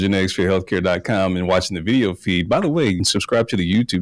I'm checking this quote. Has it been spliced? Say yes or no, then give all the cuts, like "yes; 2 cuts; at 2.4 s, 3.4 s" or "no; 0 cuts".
yes; 1 cut; at 3.0 s